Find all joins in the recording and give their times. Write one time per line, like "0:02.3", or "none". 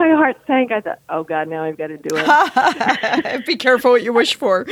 none